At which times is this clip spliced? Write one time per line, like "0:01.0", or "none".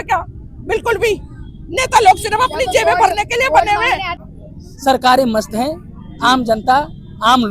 0:04.1